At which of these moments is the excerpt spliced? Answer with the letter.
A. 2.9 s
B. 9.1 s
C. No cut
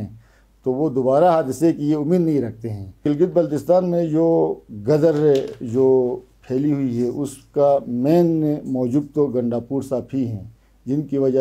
A